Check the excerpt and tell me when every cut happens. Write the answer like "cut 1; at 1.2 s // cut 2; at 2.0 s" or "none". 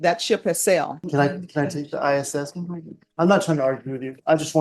cut 1; at 1.0 s